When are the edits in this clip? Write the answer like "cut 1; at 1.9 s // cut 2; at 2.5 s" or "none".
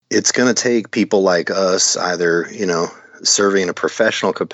none